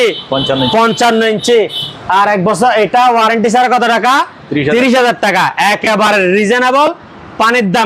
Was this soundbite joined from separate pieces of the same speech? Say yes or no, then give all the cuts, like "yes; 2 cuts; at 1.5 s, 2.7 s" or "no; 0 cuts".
no; 0 cuts